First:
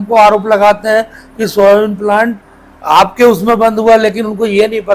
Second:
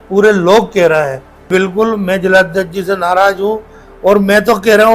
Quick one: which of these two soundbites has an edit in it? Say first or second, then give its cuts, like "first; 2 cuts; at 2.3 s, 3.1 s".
second; 1 cut; at 1.5 s